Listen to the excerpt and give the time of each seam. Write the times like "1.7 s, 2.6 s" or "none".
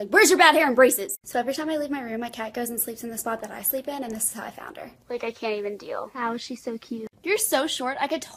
none